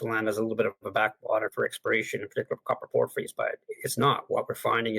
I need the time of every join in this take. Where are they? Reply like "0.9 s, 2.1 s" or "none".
1.5 s

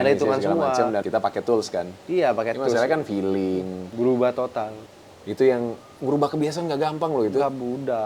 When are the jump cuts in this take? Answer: 1.1 s, 3.8 s, 4.8 s

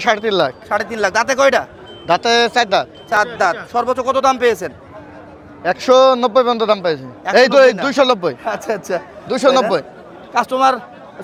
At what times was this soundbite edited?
none

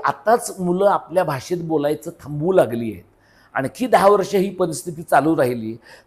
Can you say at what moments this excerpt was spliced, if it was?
none

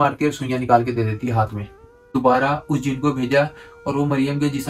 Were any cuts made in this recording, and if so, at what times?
2.0 s

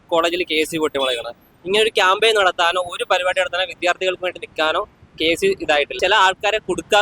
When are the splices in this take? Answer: 5.9 s

